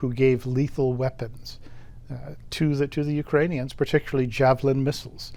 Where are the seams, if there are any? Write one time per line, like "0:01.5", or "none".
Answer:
none